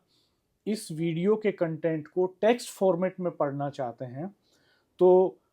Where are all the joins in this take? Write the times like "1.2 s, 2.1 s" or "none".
none